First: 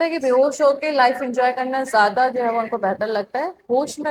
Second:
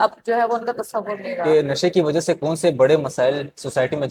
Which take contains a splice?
second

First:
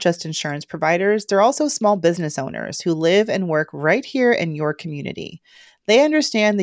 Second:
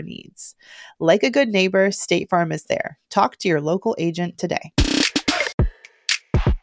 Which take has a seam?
second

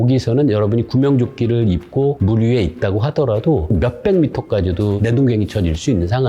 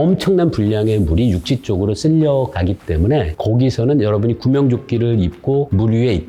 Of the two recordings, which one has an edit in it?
first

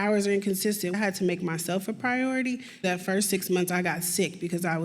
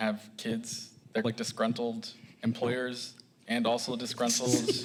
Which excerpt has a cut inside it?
first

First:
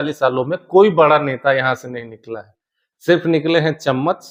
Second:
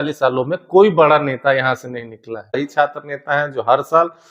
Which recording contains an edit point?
second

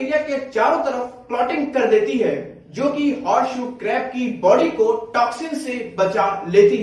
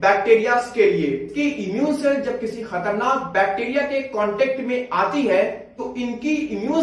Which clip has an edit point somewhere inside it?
second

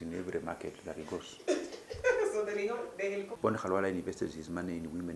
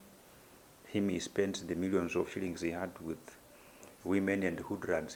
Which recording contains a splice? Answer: first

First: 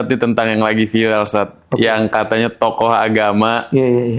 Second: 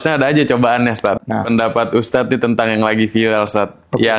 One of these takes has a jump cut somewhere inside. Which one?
second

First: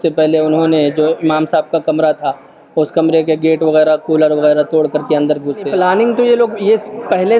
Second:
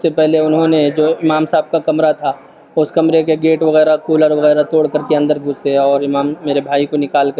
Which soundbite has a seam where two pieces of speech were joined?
first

